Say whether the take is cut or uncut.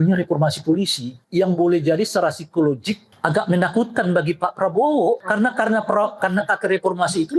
cut